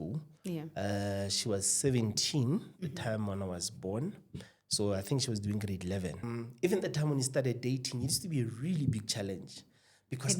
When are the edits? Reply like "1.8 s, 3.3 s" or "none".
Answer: 6.3 s